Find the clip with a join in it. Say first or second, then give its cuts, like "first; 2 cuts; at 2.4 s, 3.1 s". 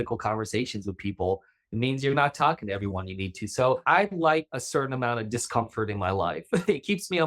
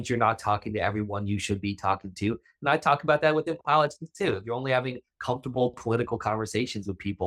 first; 2 cuts; at 3.8 s, 4.6 s